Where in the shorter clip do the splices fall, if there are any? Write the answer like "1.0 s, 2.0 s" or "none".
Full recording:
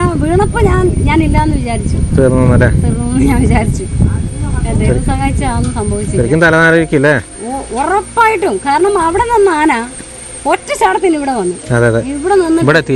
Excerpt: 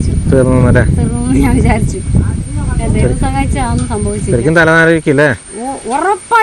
none